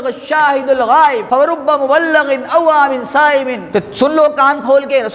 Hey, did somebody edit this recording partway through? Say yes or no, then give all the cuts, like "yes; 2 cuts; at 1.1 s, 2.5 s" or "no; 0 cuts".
yes; 2 cuts; at 1.2 s, 3.6 s